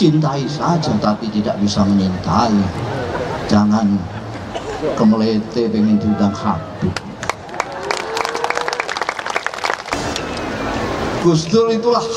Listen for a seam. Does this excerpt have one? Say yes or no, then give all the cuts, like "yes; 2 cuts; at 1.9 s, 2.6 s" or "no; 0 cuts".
yes; 1 cut; at 10.0 s